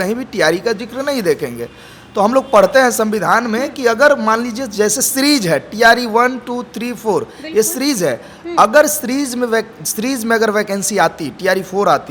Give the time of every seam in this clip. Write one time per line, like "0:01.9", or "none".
none